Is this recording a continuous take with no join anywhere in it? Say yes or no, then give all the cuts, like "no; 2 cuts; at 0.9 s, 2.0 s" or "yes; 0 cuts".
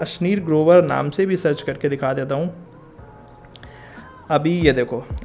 yes; 0 cuts